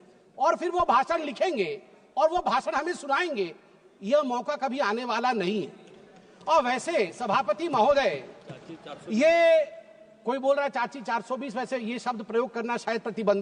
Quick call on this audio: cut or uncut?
uncut